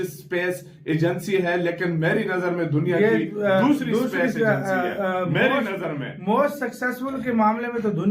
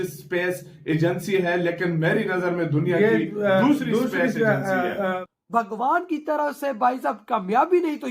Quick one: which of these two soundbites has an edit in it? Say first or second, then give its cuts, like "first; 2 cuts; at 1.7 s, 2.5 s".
second; 1 cut; at 5.2 s